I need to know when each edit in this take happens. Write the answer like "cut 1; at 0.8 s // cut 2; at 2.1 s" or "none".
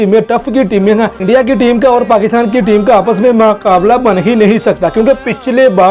cut 1; at 1.2 s